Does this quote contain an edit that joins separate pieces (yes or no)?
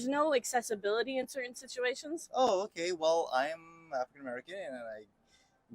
yes